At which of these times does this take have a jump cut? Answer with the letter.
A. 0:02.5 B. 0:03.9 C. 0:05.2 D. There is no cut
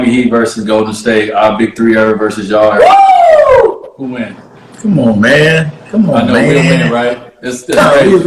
D